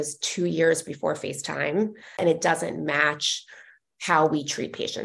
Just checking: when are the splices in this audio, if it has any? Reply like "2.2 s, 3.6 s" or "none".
2.2 s